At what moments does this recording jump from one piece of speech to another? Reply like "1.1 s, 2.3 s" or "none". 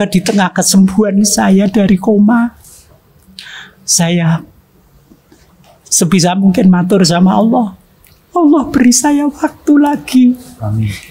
none